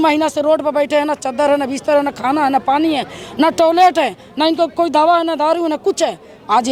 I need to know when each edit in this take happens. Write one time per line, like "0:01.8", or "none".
none